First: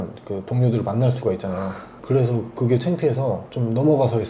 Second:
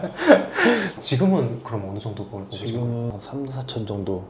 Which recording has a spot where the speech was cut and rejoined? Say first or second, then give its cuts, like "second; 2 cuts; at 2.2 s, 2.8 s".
second; 2 cuts; at 1.0 s, 3.1 s